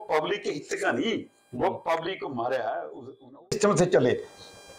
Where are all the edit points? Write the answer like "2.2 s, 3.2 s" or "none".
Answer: 3.5 s